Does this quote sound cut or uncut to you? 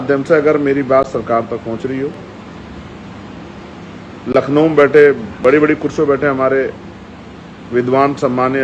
uncut